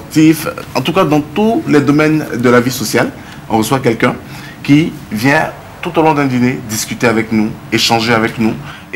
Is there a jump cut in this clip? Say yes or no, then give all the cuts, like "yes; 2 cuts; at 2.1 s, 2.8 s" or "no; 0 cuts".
no; 0 cuts